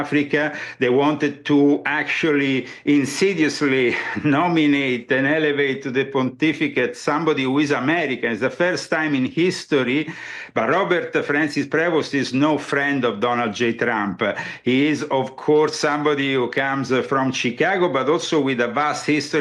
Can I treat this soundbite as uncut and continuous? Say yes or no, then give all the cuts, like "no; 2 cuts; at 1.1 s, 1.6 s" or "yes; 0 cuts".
yes; 0 cuts